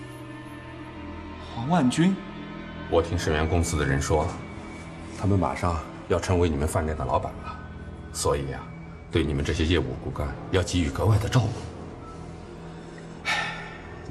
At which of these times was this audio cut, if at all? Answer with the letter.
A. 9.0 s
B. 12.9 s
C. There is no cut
C